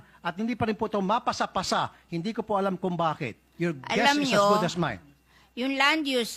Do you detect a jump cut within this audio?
no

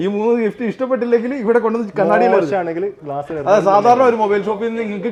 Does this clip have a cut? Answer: no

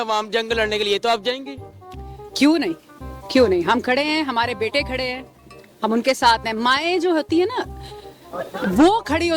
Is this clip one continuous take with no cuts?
yes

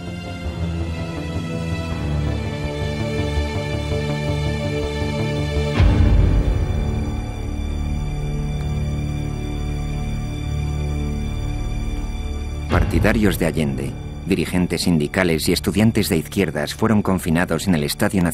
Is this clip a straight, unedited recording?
no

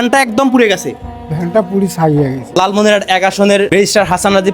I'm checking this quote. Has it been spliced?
yes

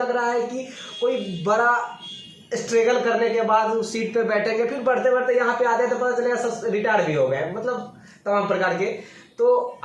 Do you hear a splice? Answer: no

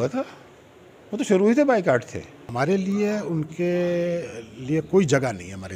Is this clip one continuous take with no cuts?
no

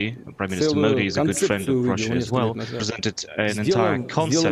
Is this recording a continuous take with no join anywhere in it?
no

